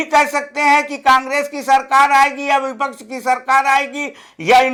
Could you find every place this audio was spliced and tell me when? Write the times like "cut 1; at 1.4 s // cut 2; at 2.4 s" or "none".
none